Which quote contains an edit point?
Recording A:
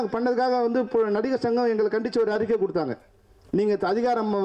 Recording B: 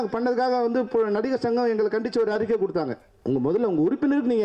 B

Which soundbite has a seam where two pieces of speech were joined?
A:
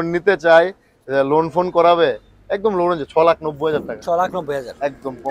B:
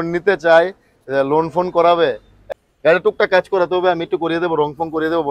B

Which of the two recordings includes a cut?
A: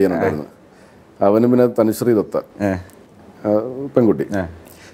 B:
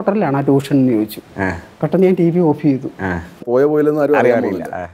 B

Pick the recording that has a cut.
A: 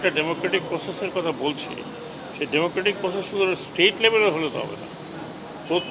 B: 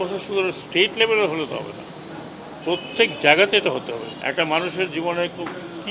B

